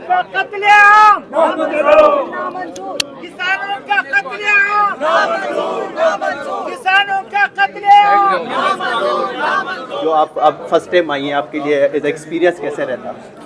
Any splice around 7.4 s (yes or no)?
no